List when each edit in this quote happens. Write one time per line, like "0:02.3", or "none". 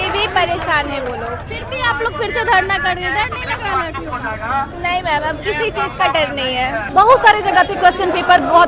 0:01.5
0:06.8